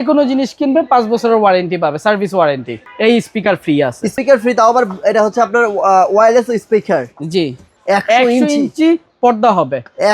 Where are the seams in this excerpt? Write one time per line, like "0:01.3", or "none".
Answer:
0:02.7
0:04.1
0:07.7